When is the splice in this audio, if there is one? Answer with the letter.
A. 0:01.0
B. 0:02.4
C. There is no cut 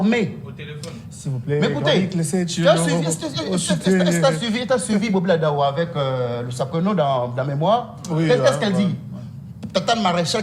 C